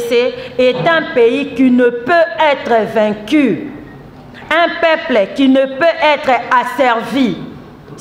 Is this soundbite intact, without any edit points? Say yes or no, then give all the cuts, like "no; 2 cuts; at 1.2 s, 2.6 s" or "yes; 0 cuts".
yes; 0 cuts